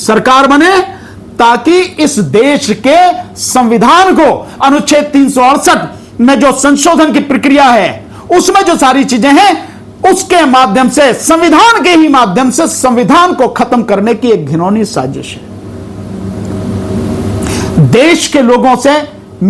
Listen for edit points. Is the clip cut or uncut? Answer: uncut